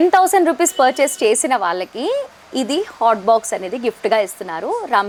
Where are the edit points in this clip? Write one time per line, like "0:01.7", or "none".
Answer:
none

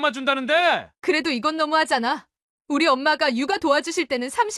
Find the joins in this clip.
0:00.9

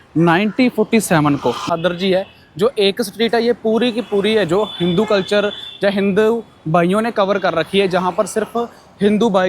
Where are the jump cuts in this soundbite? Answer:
0:01.7

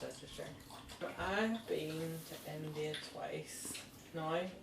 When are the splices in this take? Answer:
0:01.0

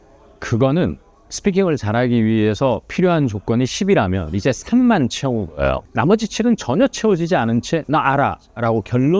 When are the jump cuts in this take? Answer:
none

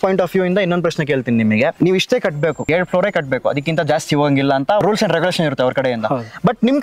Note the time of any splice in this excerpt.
0:01.7
0:02.6
0:04.8

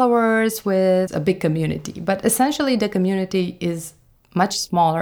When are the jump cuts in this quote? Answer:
0:01.1

